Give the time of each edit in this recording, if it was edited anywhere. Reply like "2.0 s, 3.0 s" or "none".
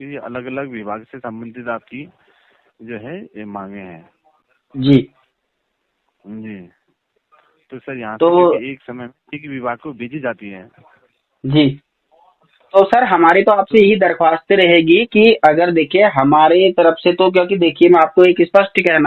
none